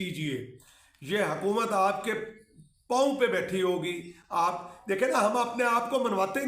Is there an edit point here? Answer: no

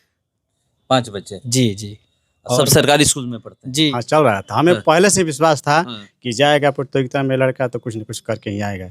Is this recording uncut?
no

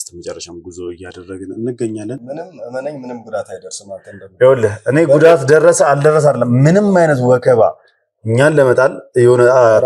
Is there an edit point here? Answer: yes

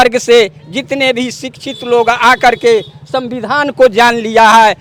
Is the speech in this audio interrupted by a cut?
no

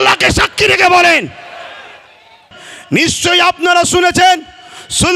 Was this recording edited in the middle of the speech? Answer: yes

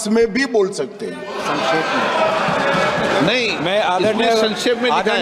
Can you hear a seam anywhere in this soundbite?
no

